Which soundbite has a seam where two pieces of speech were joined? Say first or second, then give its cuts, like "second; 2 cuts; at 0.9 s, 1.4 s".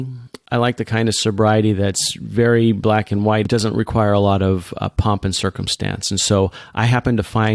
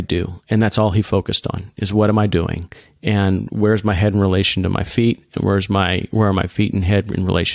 first; 1 cut; at 3.5 s